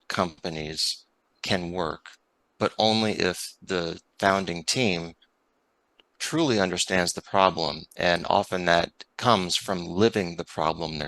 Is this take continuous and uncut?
yes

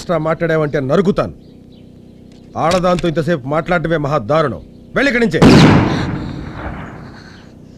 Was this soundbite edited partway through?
no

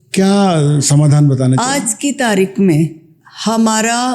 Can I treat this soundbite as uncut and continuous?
yes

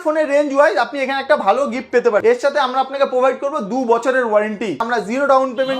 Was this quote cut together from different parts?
yes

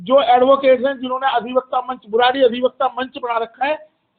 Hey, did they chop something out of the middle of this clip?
no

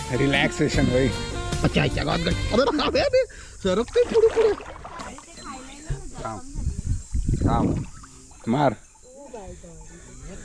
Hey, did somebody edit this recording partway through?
yes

